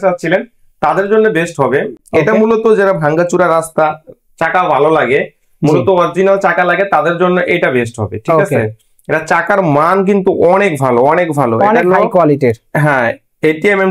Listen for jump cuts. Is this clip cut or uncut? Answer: uncut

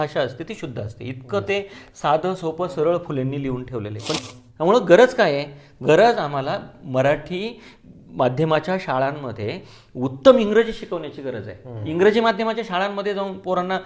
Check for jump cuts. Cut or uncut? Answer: cut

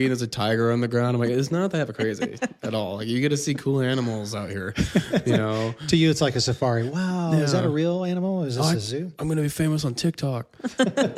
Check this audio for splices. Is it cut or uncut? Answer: uncut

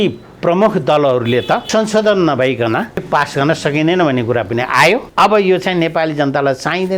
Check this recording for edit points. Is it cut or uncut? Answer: cut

